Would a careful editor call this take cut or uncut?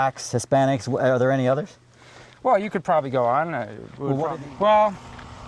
cut